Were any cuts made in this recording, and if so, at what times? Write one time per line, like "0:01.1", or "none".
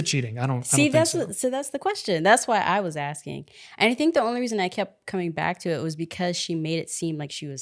none